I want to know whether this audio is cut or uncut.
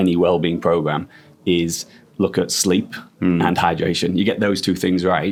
uncut